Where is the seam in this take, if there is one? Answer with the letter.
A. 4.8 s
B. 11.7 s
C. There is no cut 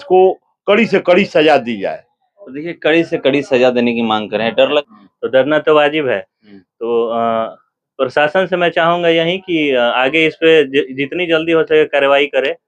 A